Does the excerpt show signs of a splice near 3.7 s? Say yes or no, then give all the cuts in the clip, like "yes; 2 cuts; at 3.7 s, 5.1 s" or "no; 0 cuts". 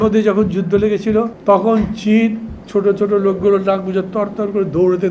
no; 1 cut; at 1.3 s